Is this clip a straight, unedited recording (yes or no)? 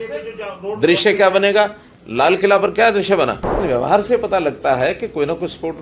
no